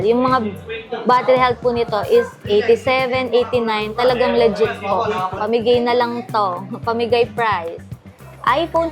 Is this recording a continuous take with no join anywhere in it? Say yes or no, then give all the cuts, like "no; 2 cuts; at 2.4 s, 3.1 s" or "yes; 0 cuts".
no; 1 cut; at 5.3 s